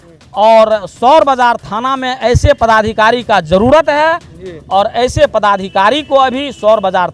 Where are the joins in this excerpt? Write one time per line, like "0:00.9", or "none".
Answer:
none